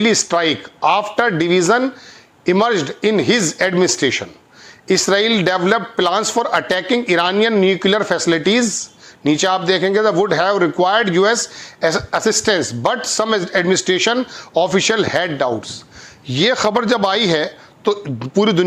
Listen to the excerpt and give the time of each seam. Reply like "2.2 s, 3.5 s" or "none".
none